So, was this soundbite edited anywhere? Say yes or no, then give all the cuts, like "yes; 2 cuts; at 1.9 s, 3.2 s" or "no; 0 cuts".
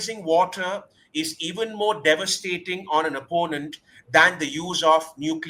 no; 0 cuts